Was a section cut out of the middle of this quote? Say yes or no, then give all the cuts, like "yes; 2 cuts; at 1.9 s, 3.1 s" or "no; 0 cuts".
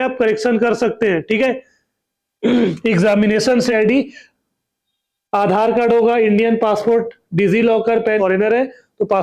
yes; 2 cuts; at 3.7 s, 8.2 s